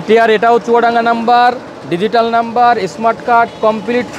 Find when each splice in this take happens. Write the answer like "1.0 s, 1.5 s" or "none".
none

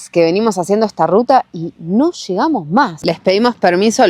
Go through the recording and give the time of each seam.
3.0 s

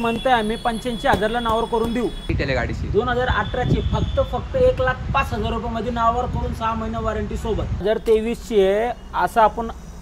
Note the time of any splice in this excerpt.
2.3 s, 7.8 s

